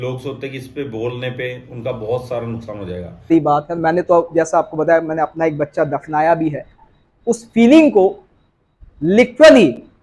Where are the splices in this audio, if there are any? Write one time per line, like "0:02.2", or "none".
0:03.3